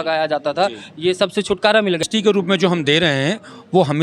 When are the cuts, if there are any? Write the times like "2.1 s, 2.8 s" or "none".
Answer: 2.0 s